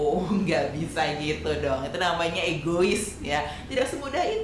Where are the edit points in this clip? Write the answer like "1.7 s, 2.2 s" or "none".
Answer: none